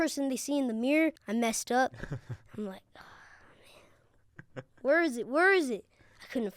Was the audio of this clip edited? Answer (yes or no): yes